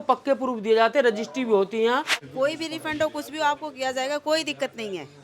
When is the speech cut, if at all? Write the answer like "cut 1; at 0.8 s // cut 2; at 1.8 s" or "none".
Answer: cut 1; at 2.2 s